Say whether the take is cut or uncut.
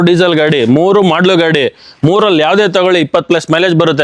uncut